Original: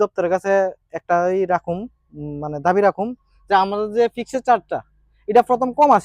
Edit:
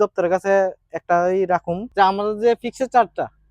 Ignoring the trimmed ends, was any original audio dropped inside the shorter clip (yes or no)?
yes